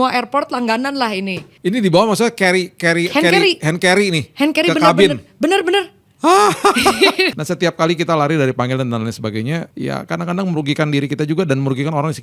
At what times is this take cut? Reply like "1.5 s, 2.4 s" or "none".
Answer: 1.4 s, 7.3 s, 9.7 s